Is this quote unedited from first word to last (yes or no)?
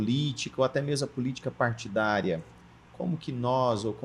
yes